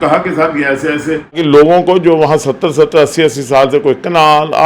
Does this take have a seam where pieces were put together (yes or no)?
yes